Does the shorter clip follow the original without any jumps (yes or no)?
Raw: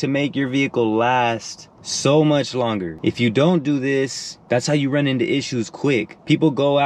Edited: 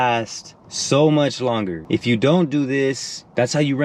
yes